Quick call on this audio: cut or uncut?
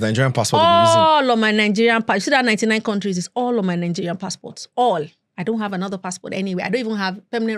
uncut